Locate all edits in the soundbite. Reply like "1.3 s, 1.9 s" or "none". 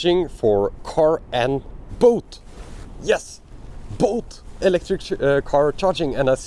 none